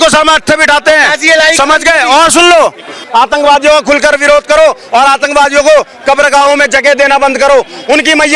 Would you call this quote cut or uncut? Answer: cut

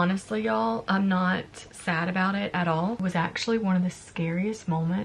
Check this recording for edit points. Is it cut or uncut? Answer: cut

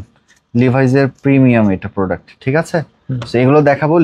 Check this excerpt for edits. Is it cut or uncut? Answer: uncut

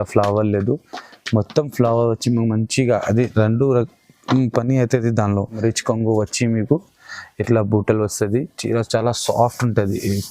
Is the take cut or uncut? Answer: cut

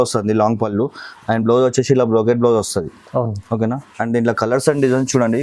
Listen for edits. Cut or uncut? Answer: uncut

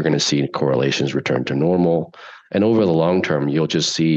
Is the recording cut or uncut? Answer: uncut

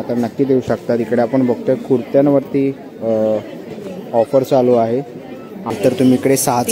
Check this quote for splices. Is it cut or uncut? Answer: cut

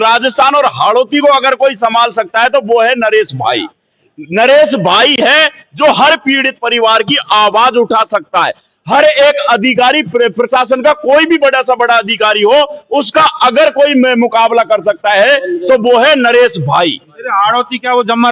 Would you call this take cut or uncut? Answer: uncut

